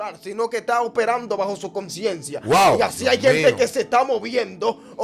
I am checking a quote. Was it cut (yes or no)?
no